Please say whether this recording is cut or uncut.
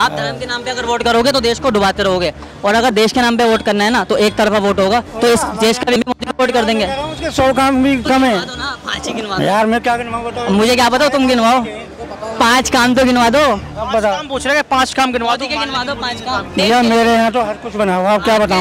cut